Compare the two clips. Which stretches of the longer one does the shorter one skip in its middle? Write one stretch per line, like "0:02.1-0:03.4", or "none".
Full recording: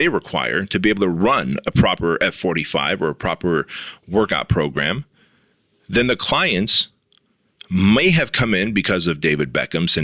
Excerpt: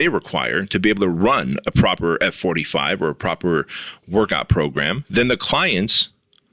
0:05.0-0:05.8